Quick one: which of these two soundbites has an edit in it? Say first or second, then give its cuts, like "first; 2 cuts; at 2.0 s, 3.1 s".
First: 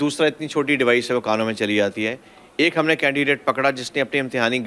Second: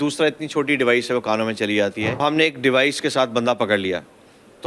second; 1 cut; at 2.2 s